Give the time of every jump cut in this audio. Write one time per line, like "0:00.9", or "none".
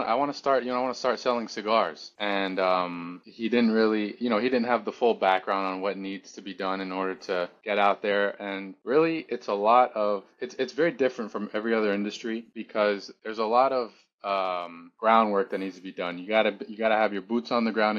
none